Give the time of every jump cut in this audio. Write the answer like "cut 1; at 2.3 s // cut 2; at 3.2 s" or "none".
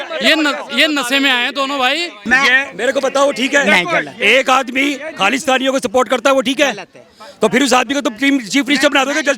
cut 1; at 2.2 s